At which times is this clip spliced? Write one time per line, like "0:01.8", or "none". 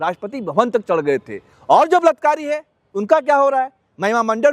0:01.5